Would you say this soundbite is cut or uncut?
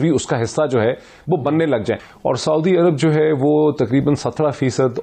cut